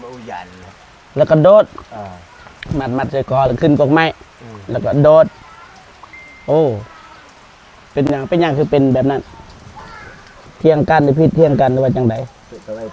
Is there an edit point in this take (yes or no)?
no